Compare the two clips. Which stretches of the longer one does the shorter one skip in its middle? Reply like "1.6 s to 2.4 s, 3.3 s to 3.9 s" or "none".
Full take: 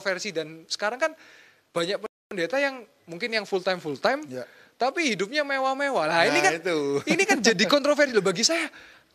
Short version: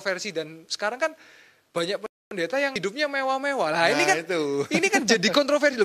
2.8 s to 5.1 s